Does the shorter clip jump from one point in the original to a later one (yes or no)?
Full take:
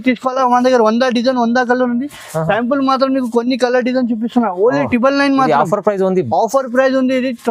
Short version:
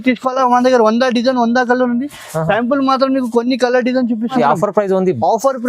yes